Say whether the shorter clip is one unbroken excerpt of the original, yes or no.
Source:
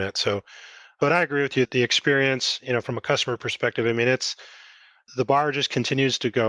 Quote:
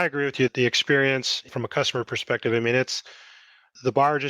no